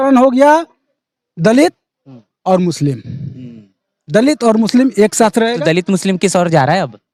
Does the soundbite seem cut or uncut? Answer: uncut